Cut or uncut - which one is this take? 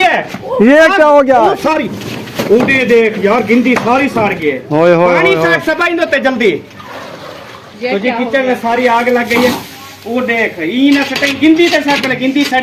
uncut